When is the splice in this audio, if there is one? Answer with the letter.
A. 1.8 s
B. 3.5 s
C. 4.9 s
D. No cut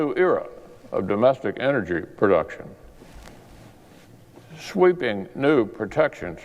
B